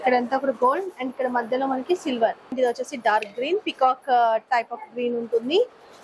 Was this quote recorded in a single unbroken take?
no; 1 cut; at 2.5 s

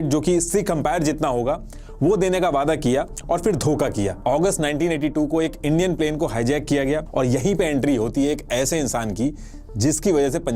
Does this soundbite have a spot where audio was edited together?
yes; 2 cuts; at 4.2 s, 7.1 s

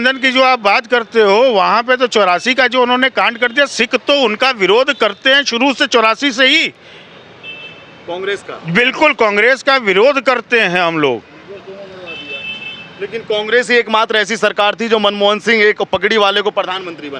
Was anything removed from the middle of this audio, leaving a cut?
no; 0 cuts

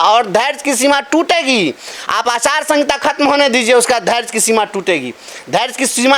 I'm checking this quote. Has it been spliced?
no; 0 cuts

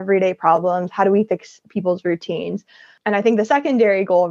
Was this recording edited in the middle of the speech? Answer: yes; 1 cut; at 2.9 s

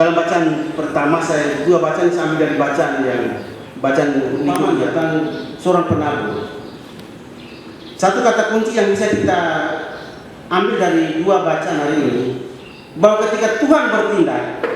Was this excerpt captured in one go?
no; 1 cut; at 4.6 s

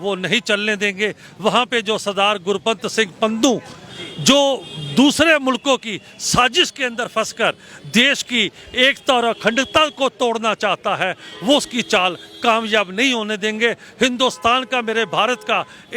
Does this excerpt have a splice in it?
no; 0 cuts

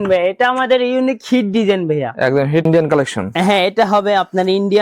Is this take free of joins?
no; 1 cut; at 2.7 s

